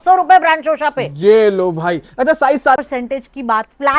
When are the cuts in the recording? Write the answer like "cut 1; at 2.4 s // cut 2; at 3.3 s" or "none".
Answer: cut 1; at 2.8 s